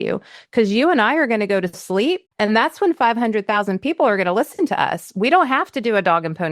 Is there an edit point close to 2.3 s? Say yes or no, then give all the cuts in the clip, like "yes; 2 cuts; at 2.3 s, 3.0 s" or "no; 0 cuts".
yes; 1 cut; at 2.3 s